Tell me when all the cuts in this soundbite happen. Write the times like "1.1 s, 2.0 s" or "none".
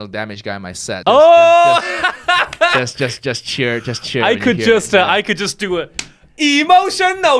1.0 s